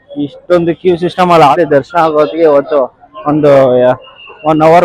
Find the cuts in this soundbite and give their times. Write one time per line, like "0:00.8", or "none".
0:01.5